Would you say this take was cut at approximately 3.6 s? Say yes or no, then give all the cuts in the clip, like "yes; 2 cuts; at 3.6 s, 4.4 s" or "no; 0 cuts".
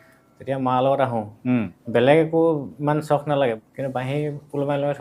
yes; 2 cuts; at 1.8 s, 3.6 s